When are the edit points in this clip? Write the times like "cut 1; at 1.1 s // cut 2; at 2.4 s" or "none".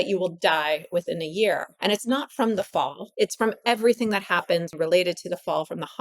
cut 1; at 1.7 s // cut 2; at 3.0 s // cut 3; at 4.7 s